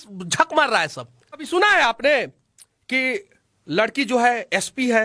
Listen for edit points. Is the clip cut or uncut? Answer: cut